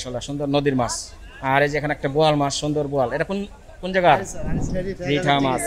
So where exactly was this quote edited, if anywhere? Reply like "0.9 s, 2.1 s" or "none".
4.7 s